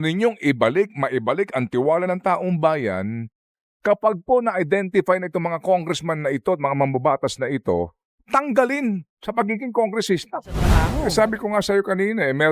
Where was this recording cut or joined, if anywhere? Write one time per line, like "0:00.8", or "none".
0:10.8